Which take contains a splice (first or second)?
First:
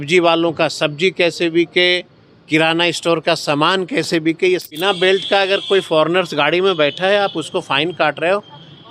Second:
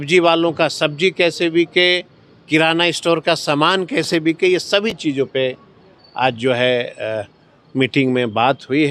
first